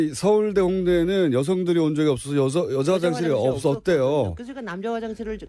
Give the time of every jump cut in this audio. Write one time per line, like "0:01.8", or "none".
0:01.0